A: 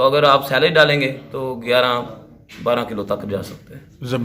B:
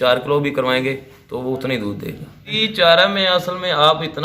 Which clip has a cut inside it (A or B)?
B